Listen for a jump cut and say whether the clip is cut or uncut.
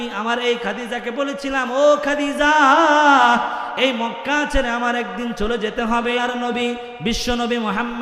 cut